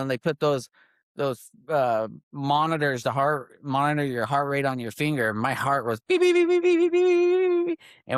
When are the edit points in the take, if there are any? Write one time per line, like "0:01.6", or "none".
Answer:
none